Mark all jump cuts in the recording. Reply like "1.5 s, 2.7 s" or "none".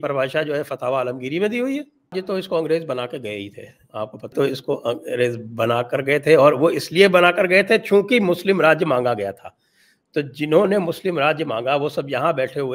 2.1 s, 4.3 s